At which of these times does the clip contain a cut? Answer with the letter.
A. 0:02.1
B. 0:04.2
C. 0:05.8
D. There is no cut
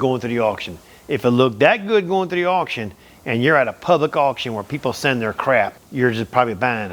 C